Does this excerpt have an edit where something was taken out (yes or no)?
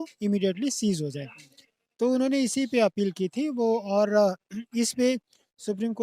no